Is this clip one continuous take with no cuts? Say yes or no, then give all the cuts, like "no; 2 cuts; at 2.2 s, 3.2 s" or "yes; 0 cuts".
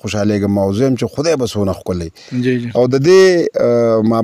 yes; 0 cuts